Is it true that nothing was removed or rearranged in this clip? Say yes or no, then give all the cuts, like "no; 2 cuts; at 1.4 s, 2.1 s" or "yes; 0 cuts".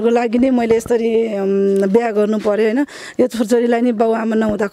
yes; 0 cuts